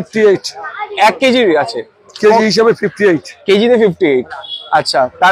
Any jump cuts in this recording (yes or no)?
no